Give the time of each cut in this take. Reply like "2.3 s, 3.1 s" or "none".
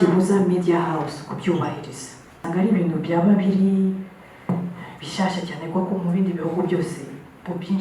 2.4 s